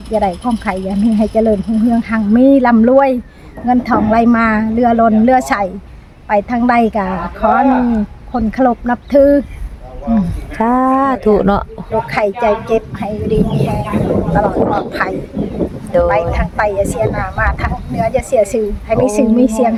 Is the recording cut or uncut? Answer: uncut